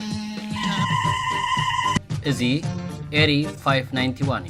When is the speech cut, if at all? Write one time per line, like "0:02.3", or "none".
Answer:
none

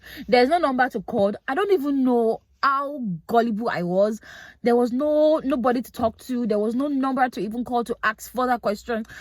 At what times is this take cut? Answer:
none

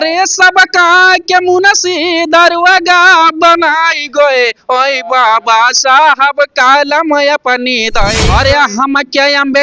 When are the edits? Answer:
0:08.2

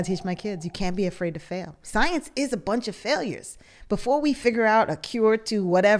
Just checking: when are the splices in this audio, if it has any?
0:01.8

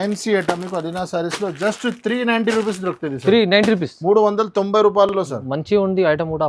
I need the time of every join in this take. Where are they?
none

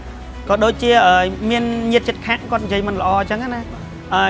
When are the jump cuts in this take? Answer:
none

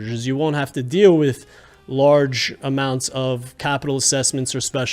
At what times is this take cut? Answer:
none

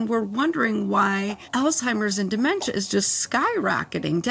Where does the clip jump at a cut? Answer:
0:01.5

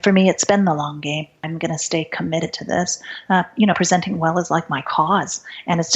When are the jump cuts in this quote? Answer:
0:01.4

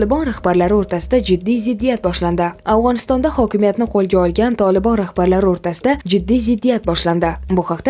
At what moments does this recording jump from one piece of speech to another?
none

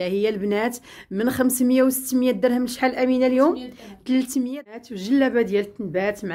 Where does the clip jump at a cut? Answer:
0:04.7

